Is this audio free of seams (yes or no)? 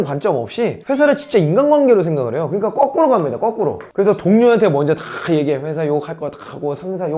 yes